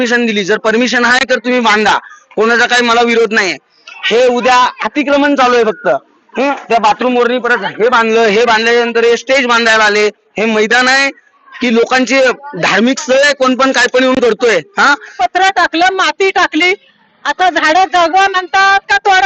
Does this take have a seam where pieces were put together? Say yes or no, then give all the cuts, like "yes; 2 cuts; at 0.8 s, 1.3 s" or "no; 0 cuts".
yes; 1 cut; at 15.2 s